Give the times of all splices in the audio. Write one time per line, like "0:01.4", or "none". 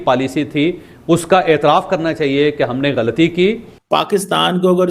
0:03.7